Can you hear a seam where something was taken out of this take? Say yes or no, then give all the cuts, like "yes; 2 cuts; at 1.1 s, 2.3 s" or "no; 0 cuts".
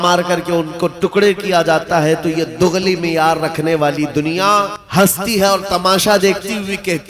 yes; 1 cut; at 4.8 s